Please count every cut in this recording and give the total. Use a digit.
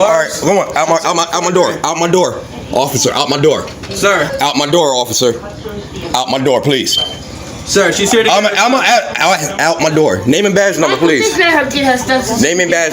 0